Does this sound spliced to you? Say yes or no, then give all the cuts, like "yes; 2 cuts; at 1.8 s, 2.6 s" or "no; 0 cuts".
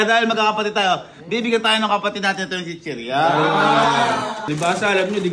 yes; 1 cut; at 4.4 s